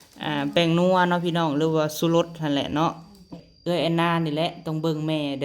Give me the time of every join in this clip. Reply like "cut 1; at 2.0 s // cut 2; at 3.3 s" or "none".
cut 1; at 3.4 s